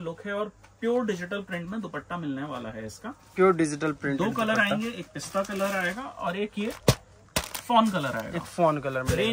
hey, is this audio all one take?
yes; 0 cuts

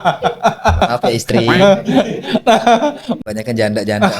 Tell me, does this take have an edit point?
yes; 2 cuts; at 0.8 s, 3.1 s

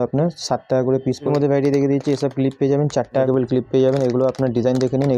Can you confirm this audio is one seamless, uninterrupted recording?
no; 2 cuts; at 1.3 s, 3.3 s

